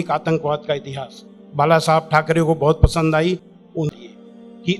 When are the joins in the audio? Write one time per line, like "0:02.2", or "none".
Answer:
0:03.9